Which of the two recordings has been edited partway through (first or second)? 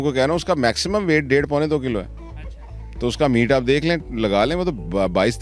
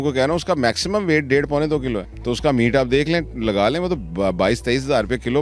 second